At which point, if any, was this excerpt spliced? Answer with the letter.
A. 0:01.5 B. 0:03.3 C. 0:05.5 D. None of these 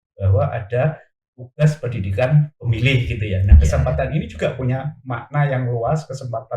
D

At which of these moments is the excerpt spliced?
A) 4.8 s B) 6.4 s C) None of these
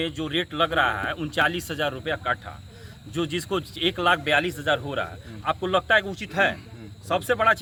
C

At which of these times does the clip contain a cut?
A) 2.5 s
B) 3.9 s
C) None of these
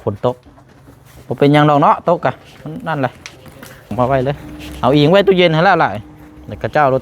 B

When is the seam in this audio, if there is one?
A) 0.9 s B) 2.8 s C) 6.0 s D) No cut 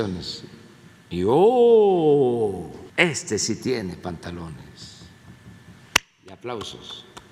B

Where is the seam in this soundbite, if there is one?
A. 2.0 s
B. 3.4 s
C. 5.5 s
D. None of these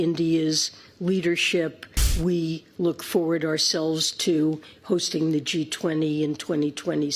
A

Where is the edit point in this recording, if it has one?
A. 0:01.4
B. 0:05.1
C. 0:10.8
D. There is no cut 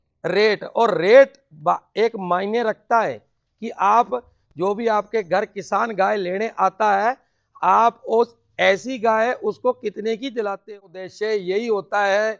C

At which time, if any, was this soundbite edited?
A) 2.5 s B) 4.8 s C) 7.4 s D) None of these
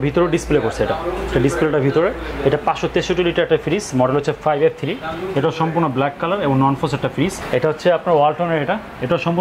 C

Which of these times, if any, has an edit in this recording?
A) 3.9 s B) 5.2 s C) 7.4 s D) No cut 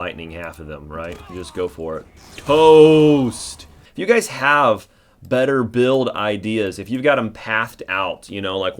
A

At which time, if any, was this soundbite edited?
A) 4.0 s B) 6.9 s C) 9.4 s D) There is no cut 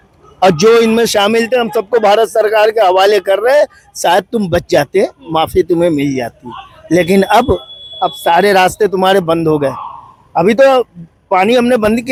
D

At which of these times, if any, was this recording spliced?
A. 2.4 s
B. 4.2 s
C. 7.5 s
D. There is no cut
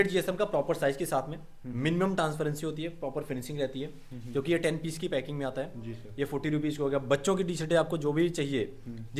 D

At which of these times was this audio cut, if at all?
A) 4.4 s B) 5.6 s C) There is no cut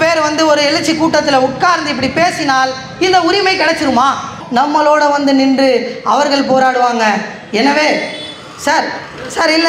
A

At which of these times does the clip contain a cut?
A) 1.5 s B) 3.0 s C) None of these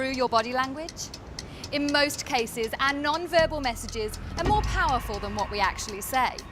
A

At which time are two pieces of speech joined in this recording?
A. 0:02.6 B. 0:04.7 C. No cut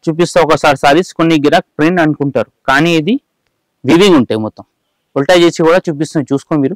C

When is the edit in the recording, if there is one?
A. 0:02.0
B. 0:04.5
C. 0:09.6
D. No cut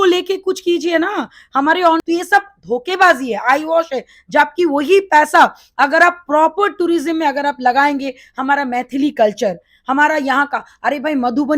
A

